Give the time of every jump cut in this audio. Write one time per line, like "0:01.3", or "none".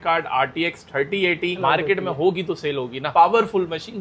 0:01.6
0:03.0